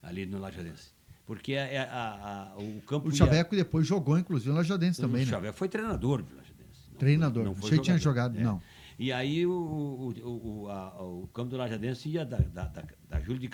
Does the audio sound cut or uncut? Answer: uncut